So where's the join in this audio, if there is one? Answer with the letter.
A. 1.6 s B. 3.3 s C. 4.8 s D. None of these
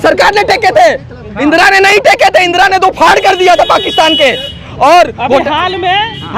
D